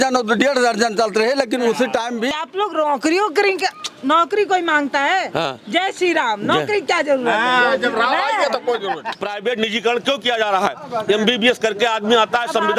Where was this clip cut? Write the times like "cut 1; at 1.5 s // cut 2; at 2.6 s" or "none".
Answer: cut 1; at 2.3 s // cut 2; at 9.1 s